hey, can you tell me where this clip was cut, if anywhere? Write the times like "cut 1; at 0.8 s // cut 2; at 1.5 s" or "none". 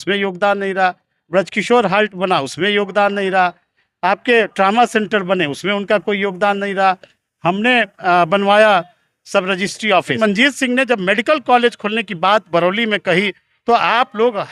cut 1; at 10.2 s